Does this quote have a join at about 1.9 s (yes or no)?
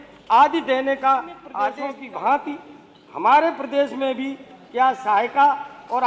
yes